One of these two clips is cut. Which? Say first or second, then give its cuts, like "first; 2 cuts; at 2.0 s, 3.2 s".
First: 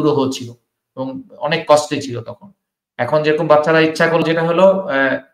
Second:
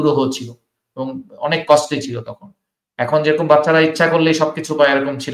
first; 1 cut; at 4.2 s